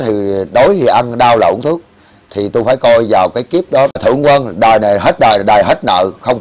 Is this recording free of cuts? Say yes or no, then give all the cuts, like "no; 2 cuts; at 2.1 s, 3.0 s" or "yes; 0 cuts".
no; 1 cut; at 4.0 s